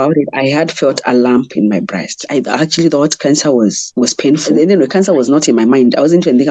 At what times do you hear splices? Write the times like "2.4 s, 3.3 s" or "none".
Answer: 2.2 s, 4.5 s